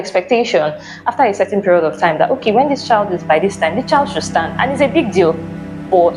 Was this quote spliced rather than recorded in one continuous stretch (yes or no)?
no